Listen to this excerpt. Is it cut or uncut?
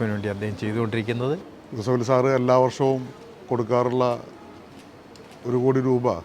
cut